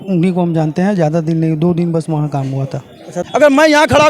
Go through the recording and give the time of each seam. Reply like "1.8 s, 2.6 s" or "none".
3.1 s